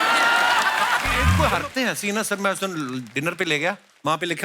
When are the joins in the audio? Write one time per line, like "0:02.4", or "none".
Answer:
0:01.4